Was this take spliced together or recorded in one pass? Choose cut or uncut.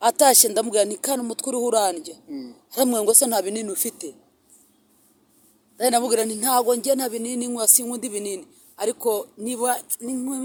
uncut